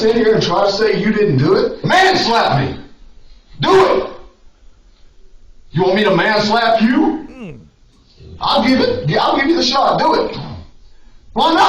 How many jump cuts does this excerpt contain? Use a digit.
1